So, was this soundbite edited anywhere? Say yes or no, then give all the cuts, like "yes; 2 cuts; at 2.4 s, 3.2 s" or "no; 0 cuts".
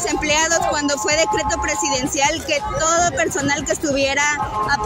no; 0 cuts